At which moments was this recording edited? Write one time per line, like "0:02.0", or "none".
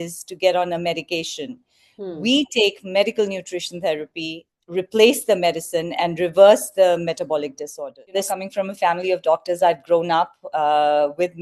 0:08.2